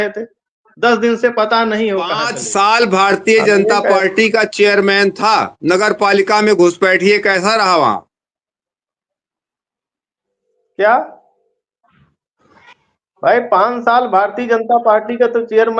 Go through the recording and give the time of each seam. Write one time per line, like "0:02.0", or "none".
0:02.3